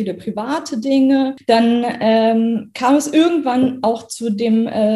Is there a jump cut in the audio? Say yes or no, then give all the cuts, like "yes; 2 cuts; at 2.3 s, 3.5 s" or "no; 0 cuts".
yes; 1 cut; at 1.4 s